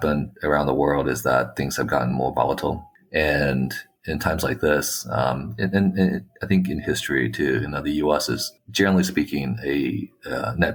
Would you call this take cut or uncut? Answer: uncut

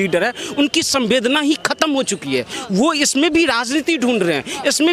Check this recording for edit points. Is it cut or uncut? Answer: uncut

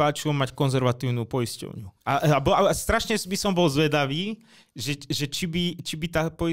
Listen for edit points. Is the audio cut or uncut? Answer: uncut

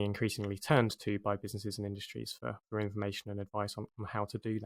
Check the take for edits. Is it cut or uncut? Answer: uncut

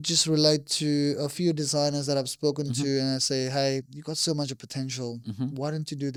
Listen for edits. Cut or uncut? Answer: uncut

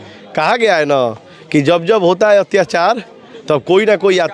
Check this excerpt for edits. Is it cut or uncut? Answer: uncut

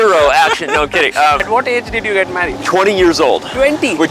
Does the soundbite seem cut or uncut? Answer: cut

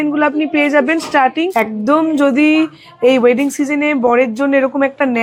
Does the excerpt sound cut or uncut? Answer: cut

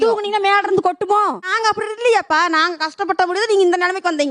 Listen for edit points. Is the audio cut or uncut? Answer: cut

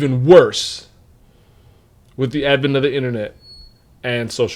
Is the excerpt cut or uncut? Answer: uncut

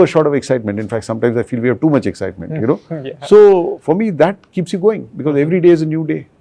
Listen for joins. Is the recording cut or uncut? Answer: uncut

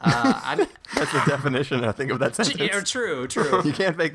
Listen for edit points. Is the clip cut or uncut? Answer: uncut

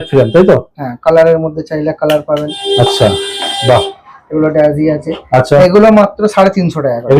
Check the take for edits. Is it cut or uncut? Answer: uncut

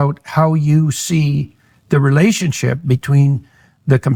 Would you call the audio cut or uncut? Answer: uncut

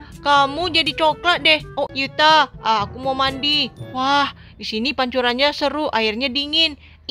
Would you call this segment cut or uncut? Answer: cut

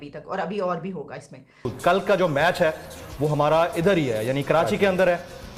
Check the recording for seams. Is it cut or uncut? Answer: cut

